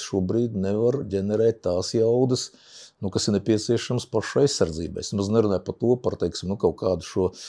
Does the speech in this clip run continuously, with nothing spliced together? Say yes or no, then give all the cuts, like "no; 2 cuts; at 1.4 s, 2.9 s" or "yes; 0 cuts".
yes; 0 cuts